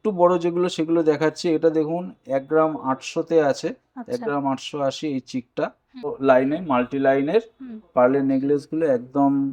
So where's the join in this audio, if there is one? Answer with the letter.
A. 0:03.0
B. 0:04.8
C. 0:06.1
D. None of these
C